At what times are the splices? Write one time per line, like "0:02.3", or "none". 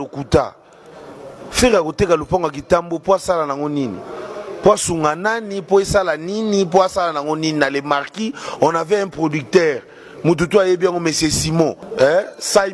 0:11.8